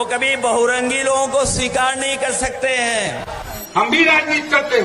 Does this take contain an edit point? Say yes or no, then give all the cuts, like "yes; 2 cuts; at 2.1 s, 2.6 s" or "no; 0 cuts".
yes; 1 cut; at 3.5 s